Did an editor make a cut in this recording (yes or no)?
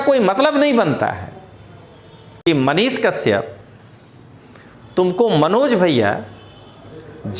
yes